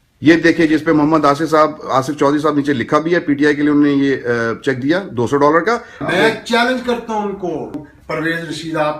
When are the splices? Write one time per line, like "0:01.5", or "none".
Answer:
0:06.0